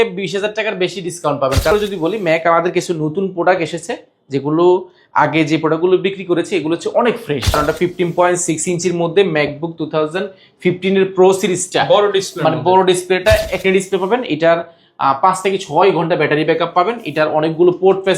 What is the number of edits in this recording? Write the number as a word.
three